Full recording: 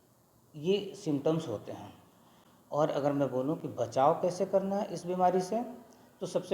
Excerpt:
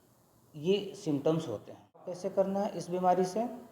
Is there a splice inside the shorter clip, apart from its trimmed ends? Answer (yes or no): yes